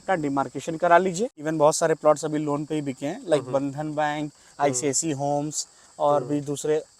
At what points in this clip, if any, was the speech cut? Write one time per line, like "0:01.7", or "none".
0:01.4